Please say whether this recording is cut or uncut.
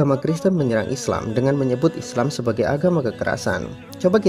uncut